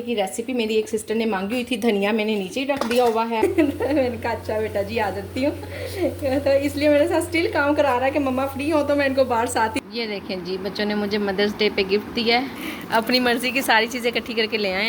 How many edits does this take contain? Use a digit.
3